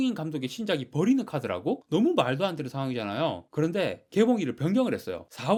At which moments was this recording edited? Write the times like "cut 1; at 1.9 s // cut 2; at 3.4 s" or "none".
none